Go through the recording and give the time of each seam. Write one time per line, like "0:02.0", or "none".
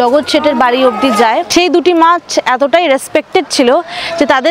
0:01.5